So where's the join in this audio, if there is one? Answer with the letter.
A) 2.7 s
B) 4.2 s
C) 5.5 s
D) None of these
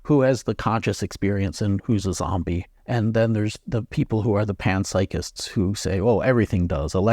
A